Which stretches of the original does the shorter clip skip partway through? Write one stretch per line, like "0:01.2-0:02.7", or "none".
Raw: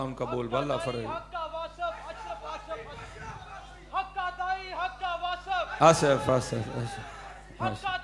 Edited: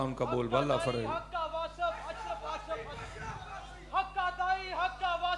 none